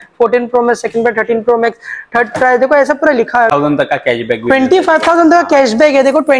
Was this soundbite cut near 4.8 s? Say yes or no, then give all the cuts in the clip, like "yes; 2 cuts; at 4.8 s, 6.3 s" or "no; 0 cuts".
no; 1 cut; at 3.5 s